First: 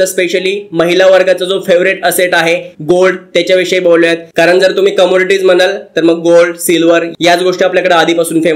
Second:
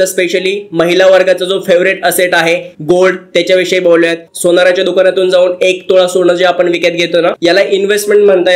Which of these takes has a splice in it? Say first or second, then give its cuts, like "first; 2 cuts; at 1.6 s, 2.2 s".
second; 2 cuts; at 4.2 s, 7.4 s